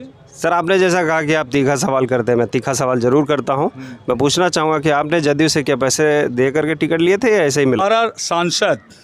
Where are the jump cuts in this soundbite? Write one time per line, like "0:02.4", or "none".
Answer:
0:07.8